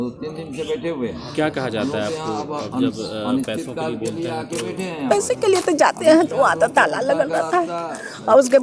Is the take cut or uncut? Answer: uncut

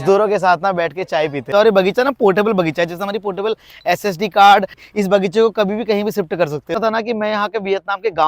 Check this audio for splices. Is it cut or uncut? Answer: cut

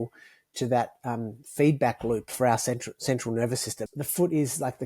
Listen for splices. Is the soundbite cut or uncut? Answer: cut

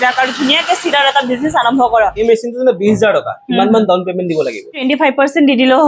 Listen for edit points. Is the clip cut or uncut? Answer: cut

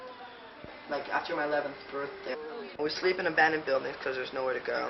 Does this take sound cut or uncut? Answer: uncut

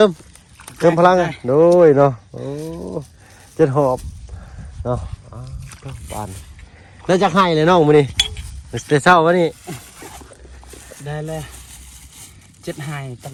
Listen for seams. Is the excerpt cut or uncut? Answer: uncut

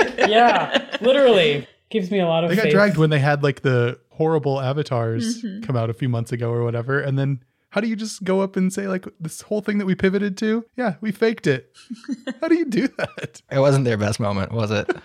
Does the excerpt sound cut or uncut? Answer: cut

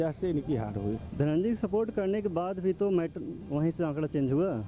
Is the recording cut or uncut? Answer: uncut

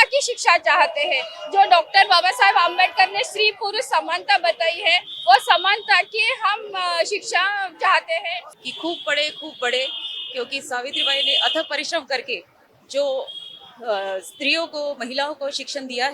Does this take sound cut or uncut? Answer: cut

